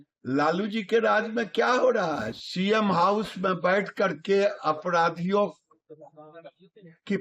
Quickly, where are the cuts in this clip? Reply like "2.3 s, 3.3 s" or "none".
2.3 s

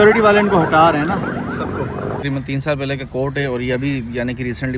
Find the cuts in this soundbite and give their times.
2.2 s

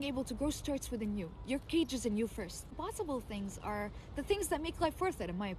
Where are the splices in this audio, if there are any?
2.7 s

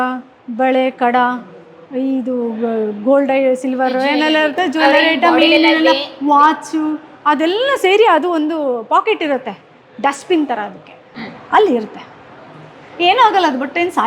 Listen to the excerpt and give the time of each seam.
none

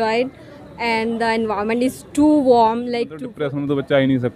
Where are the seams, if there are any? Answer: 3.2 s

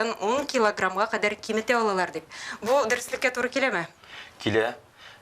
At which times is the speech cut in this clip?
none

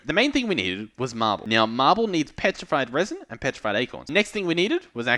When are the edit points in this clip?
1.4 s, 4.1 s

